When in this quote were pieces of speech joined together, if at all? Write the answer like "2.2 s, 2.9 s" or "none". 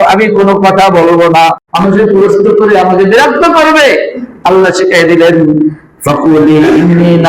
1.7 s